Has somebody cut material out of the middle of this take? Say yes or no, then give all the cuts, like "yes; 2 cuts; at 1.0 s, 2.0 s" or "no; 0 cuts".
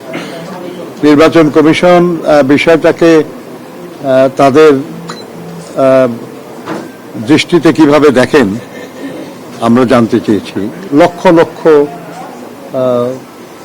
yes; 1 cut; at 10.7 s